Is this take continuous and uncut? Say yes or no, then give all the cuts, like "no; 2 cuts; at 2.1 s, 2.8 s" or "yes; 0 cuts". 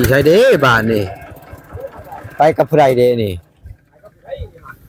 yes; 0 cuts